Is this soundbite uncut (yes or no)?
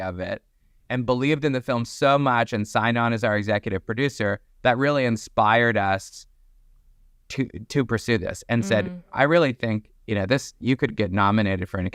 yes